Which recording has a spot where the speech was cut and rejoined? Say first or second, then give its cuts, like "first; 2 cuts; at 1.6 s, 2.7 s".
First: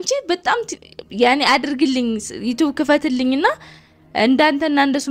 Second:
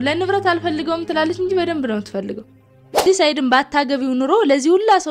second; 1 cut; at 3.0 s